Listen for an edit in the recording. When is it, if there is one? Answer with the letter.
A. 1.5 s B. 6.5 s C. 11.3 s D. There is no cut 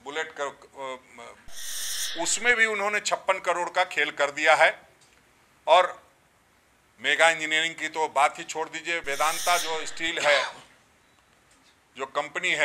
A